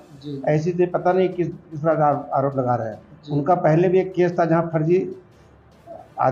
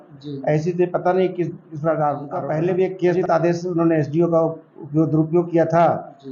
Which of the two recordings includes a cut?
second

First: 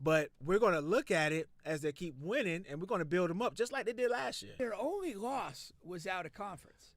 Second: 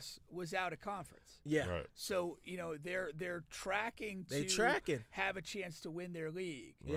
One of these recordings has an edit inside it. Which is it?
first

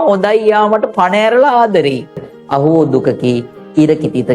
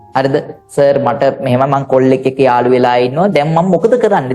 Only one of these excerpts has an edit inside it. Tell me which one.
first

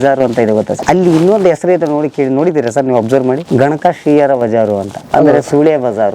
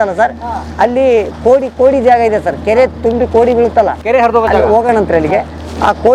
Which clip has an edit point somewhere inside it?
first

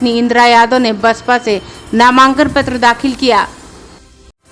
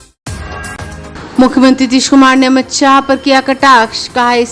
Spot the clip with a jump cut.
second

